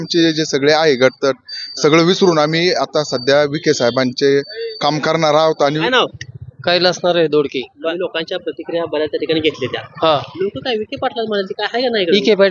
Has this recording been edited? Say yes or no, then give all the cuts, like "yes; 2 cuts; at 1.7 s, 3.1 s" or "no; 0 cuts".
no; 0 cuts